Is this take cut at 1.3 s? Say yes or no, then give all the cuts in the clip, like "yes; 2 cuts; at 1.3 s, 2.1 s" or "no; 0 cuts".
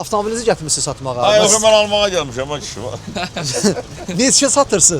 no; 0 cuts